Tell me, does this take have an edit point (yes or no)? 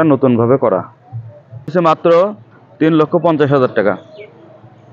yes